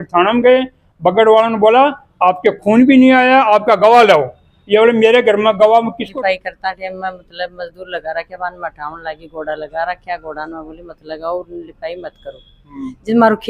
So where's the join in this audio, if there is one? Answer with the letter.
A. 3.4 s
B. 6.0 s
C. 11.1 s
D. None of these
B